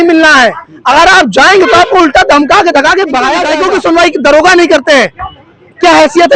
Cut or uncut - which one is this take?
cut